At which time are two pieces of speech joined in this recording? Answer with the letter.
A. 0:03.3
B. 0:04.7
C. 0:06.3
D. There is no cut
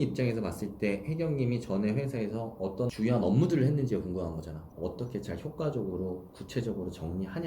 B